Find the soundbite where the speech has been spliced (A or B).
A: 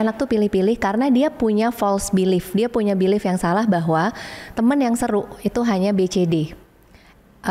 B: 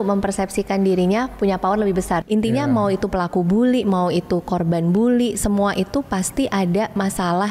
B